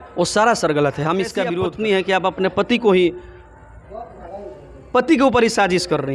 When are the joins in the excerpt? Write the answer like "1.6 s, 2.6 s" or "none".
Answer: 1.5 s